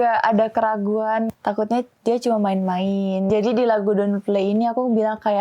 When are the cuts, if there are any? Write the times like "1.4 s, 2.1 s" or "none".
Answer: 1.3 s, 3.3 s

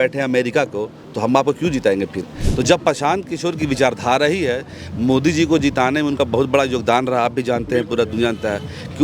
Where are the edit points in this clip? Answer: 2.4 s

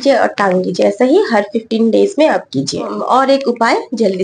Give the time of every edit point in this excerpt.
none

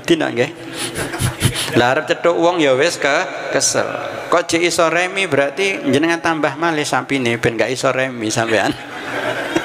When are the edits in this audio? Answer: none

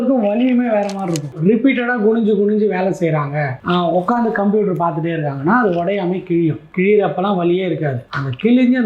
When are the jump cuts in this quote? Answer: 1.3 s

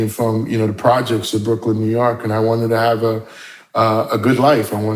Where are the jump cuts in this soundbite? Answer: none

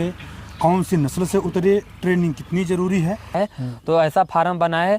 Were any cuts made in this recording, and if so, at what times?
3.3 s

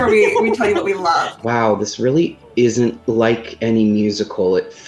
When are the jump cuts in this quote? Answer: 1.4 s, 3.0 s

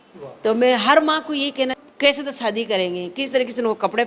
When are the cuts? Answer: 1.8 s

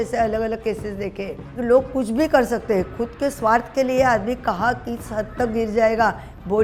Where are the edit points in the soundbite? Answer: none

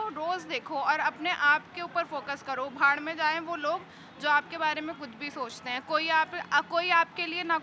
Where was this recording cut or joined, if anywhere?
none

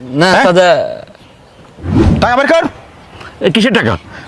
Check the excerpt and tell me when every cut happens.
none

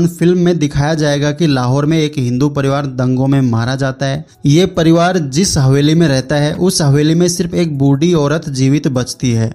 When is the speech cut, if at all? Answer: 4.3 s

